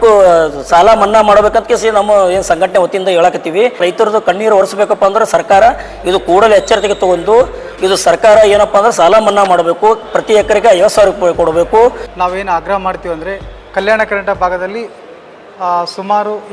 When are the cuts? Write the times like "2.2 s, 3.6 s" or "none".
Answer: 3.8 s, 12.1 s

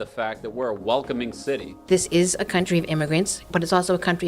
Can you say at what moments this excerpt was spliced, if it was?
1.8 s

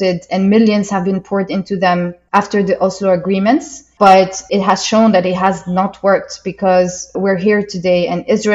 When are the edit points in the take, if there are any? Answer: 2.2 s, 3.8 s, 4.5 s, 7.0 s

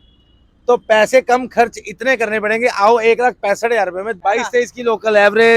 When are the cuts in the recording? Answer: 4.1 s

